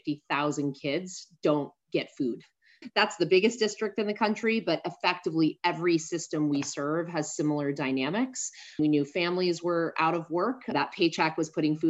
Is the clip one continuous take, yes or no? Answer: no